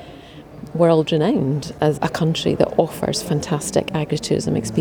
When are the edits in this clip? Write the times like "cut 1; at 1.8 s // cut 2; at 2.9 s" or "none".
cut 1; at 2.0 s